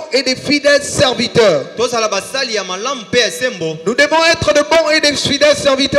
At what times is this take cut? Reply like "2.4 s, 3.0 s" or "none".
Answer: none